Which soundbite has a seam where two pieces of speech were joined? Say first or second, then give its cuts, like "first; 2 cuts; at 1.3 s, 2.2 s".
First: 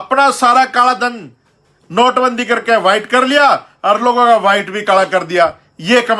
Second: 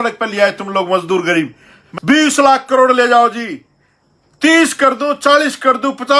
second; 1 cut; at 1.8 s